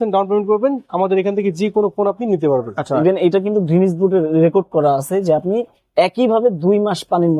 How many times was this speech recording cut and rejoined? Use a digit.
1